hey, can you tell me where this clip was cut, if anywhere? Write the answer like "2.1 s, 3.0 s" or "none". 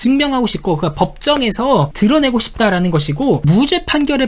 1.9 s